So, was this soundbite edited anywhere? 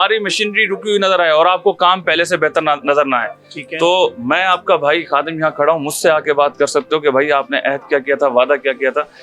no; 0 cuts

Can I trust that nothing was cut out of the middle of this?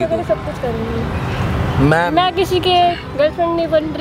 yes; 0 cuts

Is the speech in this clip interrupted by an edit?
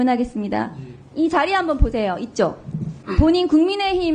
yes; 1 cut; at 3.0 s

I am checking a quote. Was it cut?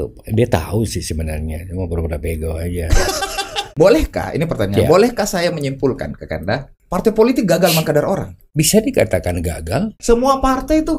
yes; 4 cuts; at 3.7 s, 6.8 s, 8.4 s, 10.0 s

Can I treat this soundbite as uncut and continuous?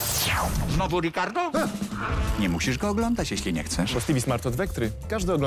yes; 0 cuts

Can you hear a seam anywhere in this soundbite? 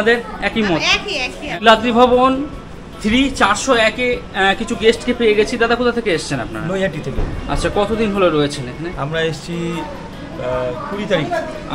yes; 1 cut; at 1.6 s

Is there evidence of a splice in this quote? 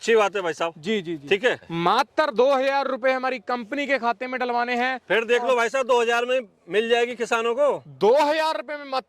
yes; 1 cut; at 1.7 s

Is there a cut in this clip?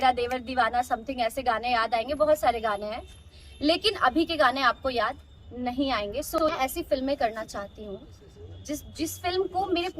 yes; 1 cut; at 6.4 s

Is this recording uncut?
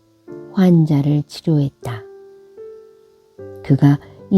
no; 2 cuts; at 1.9 s, 3.6 s

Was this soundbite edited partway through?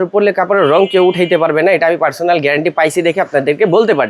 no; 0 cuts

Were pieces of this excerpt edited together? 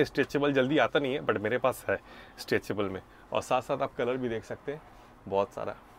no; 0 cuts

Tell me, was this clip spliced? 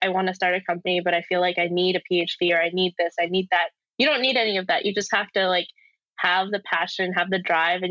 no; 0 cuts

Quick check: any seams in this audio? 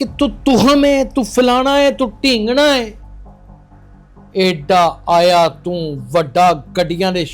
yes; 2 cuts; at 3.0 s, 4.3 s

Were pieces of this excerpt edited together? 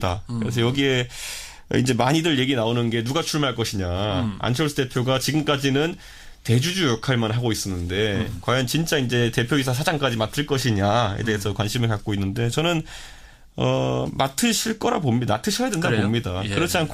yes; 1 cut; at 6.4 s

